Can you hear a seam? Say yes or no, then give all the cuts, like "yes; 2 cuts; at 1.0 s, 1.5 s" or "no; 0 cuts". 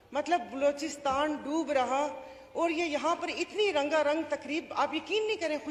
no; 0 cuts